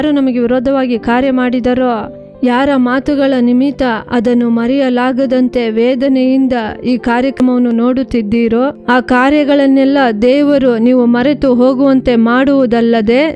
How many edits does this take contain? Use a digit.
1